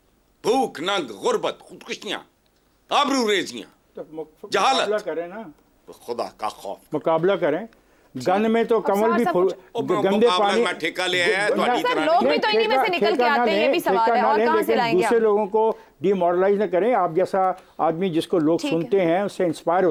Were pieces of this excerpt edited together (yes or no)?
no